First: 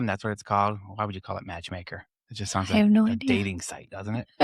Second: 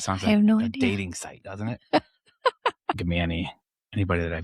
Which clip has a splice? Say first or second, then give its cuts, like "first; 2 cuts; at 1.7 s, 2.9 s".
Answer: second; 1 cut; at 2.9 s